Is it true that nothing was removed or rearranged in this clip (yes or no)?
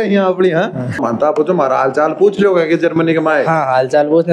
no